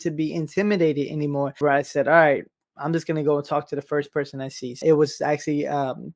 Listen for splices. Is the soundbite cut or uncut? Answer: cut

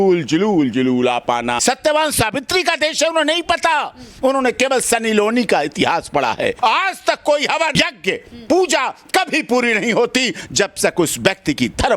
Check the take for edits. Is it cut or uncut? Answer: cut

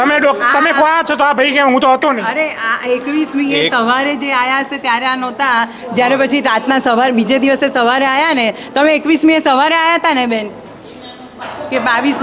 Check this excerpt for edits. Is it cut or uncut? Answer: uncut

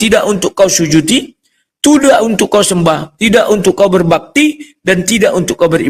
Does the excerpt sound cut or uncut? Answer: uncut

